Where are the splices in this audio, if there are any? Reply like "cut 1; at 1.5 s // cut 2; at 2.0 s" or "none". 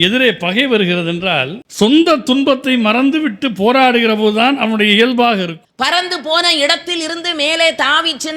cut 1; at 5.6 s